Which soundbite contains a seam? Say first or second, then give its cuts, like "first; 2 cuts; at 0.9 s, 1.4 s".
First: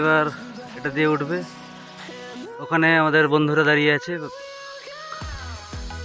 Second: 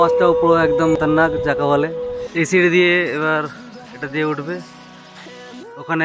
second; 2 cuts; at 1.0 s, 2.2 s